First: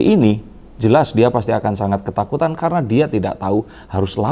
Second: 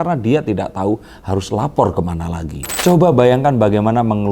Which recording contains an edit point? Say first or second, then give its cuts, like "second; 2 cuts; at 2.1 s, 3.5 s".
second; 1 cut; at 2.7 s